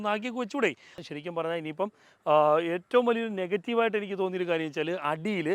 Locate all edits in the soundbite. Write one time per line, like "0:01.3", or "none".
0:01.0